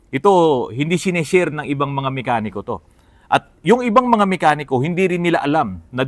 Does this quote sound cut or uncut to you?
uncut